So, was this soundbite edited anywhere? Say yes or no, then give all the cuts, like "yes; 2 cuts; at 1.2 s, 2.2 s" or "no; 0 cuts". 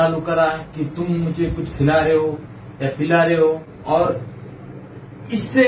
yes; 1 cut; at 3.7 s